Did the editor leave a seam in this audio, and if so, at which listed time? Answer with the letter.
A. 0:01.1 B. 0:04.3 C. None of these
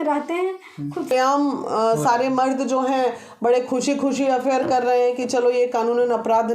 A